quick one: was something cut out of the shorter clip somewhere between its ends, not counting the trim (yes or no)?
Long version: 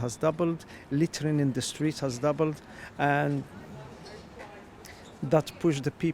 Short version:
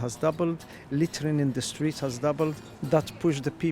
yes